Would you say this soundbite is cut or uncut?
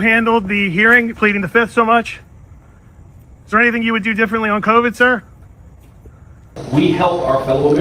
cut